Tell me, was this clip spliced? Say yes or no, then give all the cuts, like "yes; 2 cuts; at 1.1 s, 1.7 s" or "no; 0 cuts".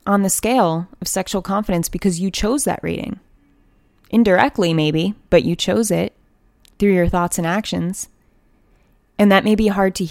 no; 0 cuts